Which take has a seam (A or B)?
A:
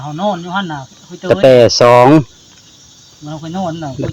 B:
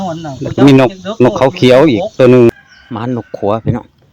B